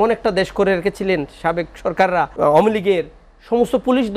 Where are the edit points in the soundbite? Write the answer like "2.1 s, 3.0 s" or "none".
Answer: 2.3 s